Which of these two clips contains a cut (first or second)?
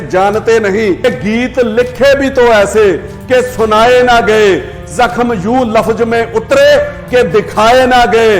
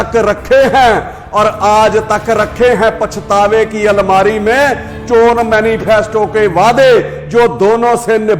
first